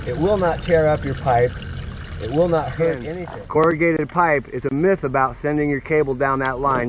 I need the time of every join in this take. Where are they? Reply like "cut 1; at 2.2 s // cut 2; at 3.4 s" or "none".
cut 1; at 3.6 s